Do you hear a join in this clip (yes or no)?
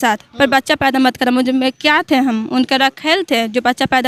no